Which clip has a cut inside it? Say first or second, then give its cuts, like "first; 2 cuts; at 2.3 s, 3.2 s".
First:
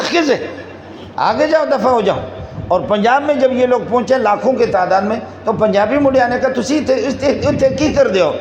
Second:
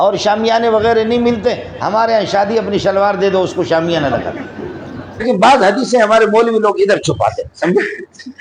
second; 1 cut; at 5.2 s